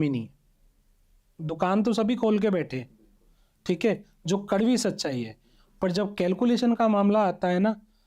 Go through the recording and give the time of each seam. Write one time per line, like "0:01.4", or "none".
0:01.3